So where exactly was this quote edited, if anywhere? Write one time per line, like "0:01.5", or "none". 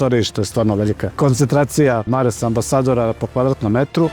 0:01.1
0:02.1